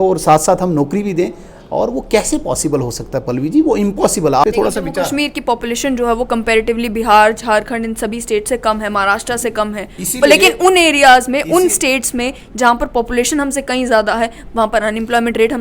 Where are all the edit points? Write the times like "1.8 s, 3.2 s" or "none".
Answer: 4.4 s